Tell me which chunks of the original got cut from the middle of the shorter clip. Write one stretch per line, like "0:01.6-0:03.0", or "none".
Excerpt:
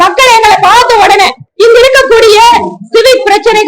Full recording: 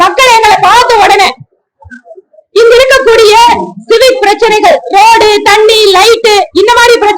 0:01.4-0:02.4